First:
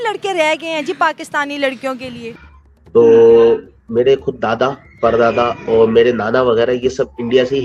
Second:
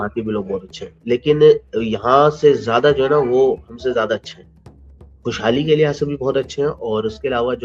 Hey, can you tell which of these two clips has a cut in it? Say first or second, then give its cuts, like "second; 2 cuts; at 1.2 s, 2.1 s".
first; 1 cut; at 2.3 s